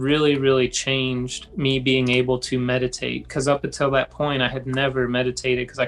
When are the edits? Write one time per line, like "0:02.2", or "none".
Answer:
none